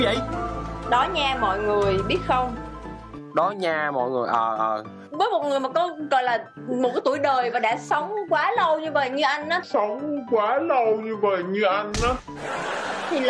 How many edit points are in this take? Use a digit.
1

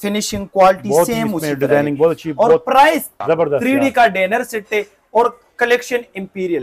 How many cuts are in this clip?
1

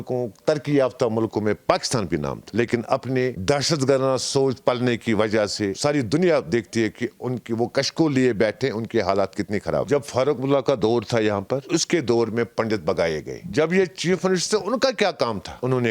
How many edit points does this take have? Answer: 2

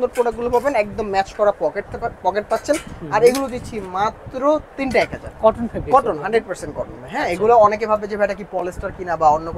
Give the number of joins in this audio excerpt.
0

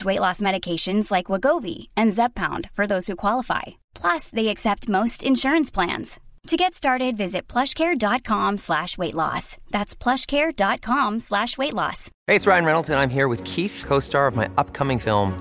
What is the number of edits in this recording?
1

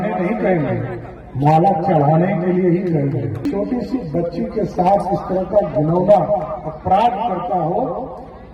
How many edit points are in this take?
1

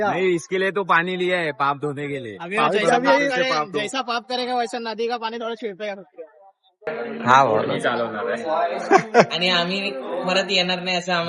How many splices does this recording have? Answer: 1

